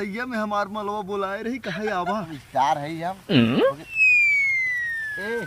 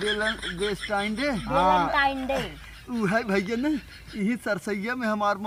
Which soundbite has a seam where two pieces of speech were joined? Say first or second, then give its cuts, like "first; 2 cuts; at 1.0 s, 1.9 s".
first; 1 cut; at 2.4 s